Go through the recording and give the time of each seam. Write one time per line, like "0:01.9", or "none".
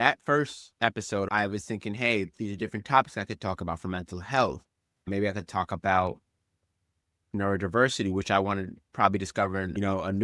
none

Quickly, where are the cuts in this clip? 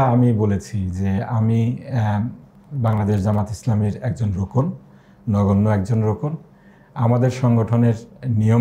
none

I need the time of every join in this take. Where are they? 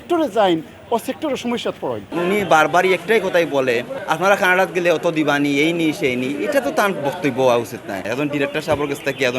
0:02.1
0:04.0
0:08.0

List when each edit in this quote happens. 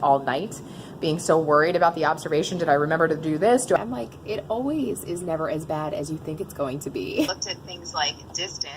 0:03.8
0:07.4

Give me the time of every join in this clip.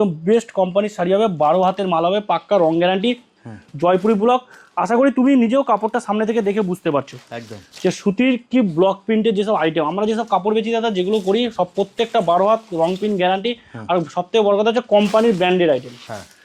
none

